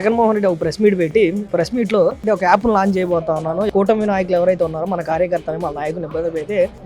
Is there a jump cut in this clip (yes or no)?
yes